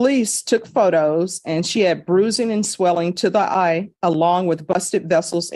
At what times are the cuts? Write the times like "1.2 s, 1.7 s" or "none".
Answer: none